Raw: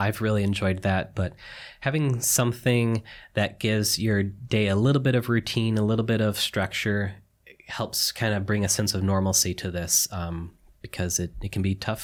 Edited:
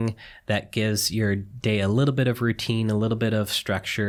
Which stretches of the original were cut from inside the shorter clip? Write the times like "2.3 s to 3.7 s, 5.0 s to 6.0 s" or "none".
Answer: none